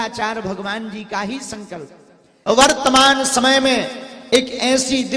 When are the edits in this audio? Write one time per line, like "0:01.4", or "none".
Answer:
0:02.3